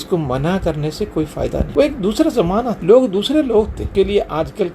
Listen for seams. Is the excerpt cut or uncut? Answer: cut